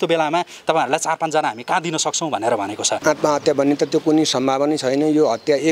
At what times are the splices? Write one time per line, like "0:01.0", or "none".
0:02.9